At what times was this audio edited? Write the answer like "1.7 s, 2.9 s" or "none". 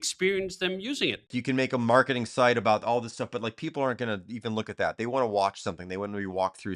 1.2 s